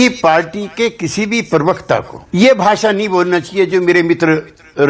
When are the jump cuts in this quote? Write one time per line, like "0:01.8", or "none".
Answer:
none